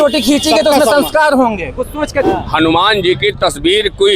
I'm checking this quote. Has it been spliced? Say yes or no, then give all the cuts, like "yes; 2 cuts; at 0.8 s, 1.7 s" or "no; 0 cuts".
yes; 1 cut; at 2.3 s